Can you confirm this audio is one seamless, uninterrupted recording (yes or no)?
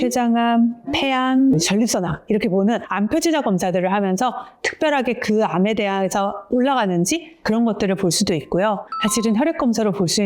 no